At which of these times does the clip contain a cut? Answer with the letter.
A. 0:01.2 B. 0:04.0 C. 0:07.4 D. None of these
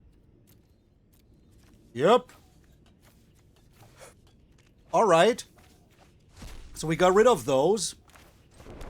A